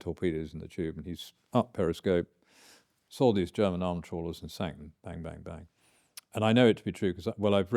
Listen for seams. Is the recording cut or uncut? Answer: uncut